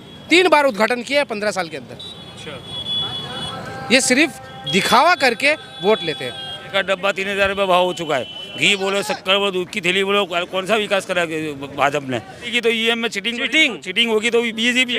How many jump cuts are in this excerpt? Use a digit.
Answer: 2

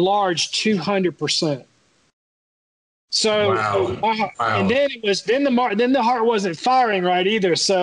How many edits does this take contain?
0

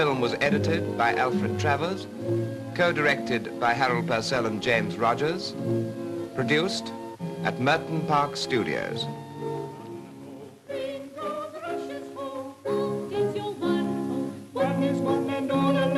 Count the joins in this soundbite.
0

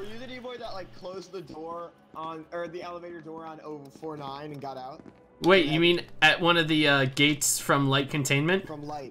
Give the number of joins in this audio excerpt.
0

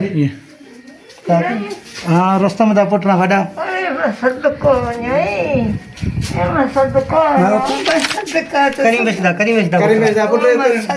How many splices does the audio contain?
1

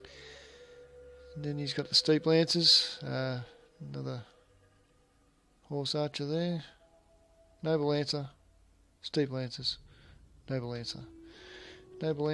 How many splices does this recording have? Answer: 0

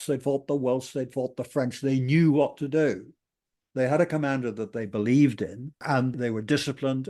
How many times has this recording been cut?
1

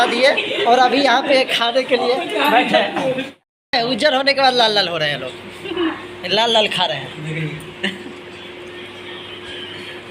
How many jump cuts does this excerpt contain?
1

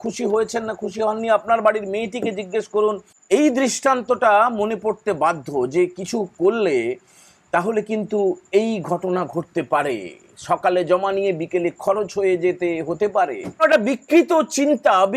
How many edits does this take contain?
2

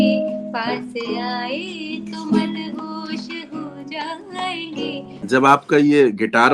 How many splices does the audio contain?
1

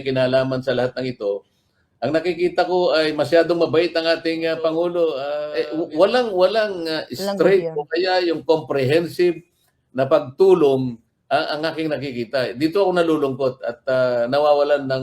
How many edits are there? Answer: 1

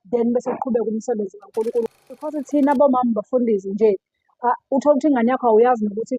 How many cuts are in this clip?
1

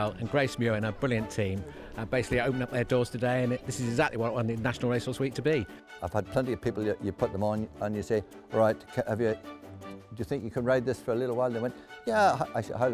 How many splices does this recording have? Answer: 1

